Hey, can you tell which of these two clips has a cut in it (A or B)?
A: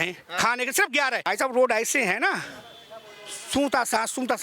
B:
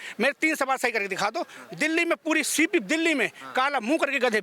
A